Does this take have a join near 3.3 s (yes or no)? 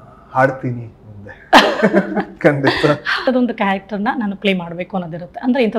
yes